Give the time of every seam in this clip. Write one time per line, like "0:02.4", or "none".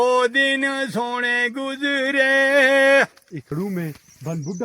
0:03.5